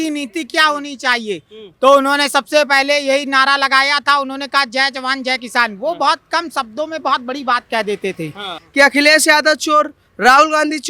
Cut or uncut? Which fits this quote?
cut